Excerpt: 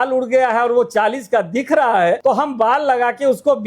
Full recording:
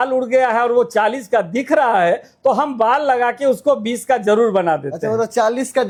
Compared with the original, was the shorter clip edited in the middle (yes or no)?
yes